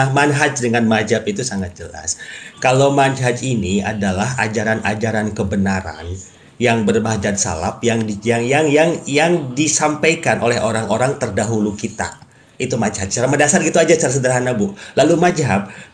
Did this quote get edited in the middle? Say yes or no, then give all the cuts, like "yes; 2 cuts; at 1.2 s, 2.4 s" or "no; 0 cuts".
no; 0 cuts